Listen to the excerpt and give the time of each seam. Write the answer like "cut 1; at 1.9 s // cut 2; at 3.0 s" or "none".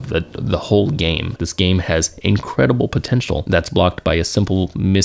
cut 1; at 1.3 s // cut 2; at 3.4 s